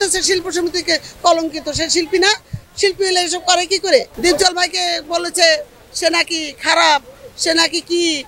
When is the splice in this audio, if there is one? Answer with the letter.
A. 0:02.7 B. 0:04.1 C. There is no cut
B